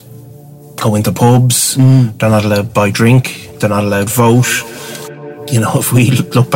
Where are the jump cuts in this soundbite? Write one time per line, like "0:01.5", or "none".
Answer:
0:05.0